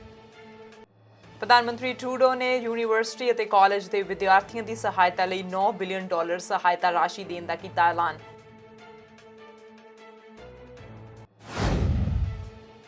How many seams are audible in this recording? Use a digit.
0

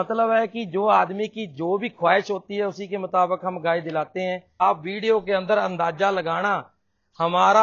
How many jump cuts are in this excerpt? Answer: 1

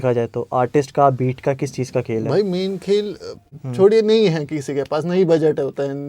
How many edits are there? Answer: 1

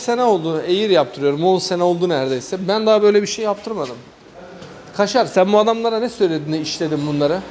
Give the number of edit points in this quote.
0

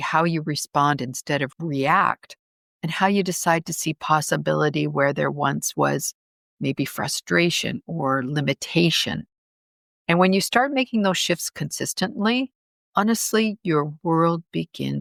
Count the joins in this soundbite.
0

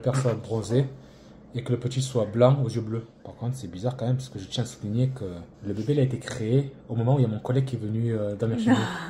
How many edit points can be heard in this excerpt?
2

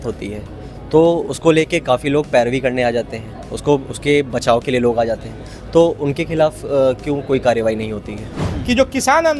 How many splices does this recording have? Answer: 1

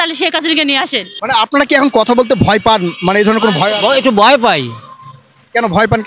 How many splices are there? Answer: 1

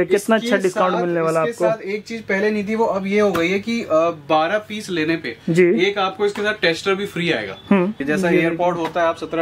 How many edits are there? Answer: 1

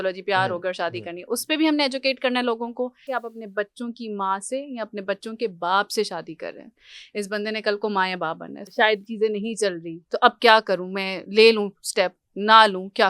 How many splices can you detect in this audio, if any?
2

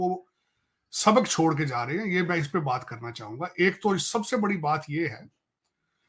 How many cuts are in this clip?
0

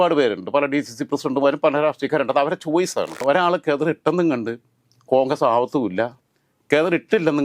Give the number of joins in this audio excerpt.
1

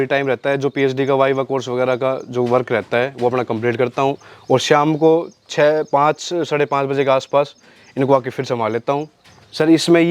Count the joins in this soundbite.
1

